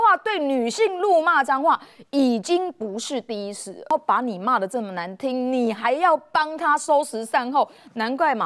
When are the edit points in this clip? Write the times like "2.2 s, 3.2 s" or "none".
3.9 s